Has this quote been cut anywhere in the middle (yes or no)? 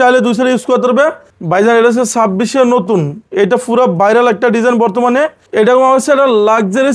yes